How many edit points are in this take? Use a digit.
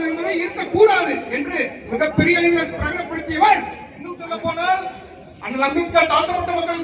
1